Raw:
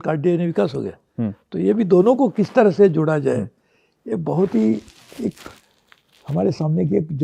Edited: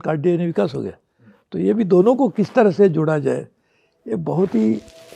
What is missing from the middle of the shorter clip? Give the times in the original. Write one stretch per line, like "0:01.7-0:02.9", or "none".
none

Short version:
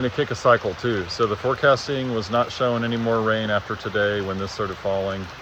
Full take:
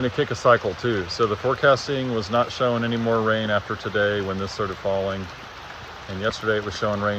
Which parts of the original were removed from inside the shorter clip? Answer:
none

